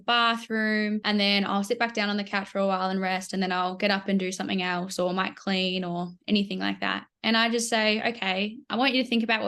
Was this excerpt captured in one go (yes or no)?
no